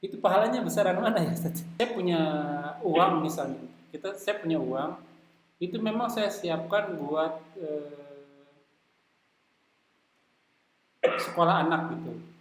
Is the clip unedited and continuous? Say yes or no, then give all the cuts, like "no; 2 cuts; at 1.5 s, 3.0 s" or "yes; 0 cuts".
no; 1 cut; at 1.6 s